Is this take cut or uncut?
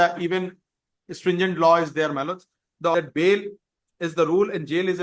cut